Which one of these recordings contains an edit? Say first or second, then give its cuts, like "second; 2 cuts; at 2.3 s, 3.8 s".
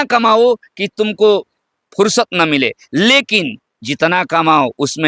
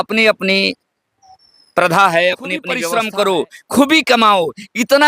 second; 1 cut; at 2.7 s